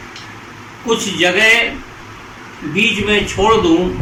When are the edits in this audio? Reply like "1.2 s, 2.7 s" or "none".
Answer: none